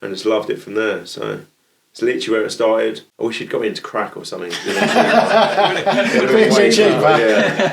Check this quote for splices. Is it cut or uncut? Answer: cut